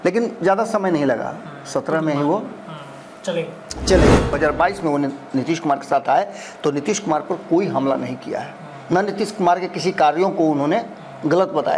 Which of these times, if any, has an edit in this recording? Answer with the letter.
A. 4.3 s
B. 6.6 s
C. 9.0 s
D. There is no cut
A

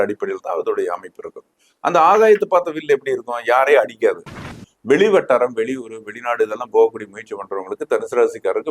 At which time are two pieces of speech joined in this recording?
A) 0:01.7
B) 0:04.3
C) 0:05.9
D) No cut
B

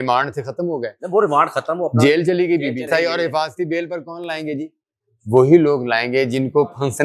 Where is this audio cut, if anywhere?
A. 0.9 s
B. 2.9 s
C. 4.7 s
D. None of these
B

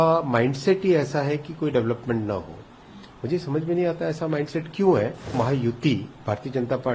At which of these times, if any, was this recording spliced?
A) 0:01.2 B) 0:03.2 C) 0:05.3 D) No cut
C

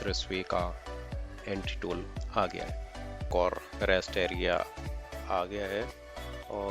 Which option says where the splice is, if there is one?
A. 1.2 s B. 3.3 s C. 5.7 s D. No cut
B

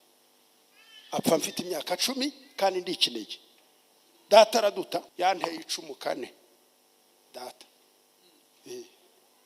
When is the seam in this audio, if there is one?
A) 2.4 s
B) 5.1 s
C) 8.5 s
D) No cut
B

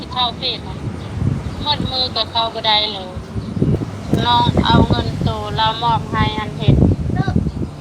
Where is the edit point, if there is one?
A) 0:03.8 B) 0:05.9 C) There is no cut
A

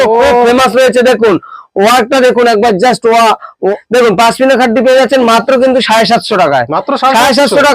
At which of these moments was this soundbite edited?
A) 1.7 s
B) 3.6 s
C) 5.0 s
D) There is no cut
B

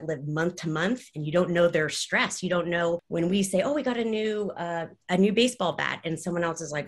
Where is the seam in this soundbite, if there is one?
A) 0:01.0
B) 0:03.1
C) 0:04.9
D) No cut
B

